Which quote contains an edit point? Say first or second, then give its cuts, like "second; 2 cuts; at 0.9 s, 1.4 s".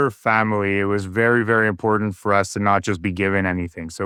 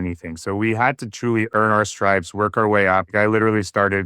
second; 2 cuts; at 1.5 s, 3.1 s